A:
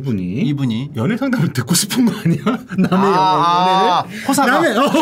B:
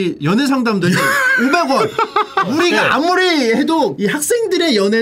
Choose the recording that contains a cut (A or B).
B